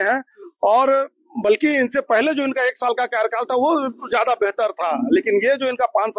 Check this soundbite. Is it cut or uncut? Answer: uncut